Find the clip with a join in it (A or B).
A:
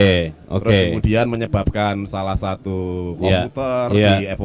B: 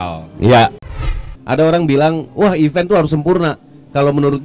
B